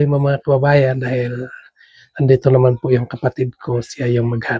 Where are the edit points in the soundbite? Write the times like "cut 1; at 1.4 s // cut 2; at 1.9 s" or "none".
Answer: none